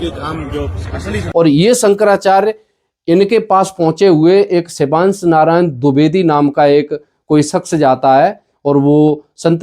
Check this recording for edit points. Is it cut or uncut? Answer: cut